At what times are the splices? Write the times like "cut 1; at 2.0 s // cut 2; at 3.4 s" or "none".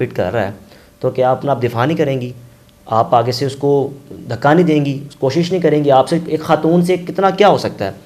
none